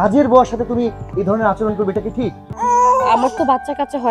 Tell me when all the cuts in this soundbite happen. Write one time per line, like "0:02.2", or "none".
0:02.5